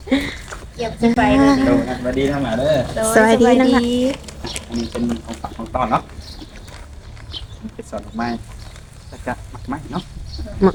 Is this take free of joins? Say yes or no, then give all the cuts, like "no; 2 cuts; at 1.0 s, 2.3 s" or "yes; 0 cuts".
yes; 0 cuts